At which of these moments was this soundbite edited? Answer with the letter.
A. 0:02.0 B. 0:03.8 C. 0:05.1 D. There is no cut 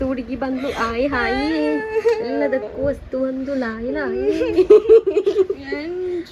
D